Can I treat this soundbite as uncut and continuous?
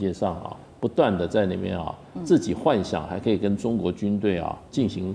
yes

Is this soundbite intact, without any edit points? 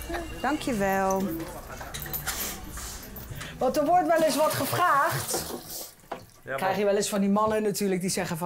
yes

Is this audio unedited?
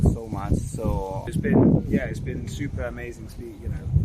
no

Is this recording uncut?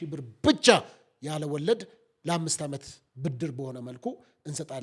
yes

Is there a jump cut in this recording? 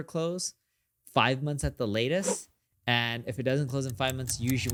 no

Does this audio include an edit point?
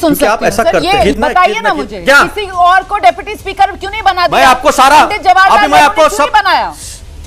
yes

